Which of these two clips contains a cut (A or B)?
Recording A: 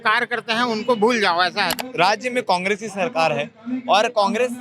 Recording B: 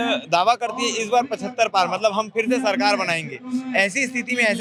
A